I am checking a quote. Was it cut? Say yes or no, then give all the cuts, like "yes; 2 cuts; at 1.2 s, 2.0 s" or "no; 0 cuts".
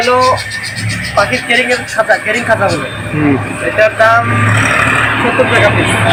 no; 0 cuts